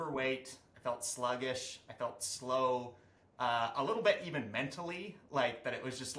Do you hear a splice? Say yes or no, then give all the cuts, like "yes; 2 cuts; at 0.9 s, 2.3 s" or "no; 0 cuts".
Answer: no; 0 cuts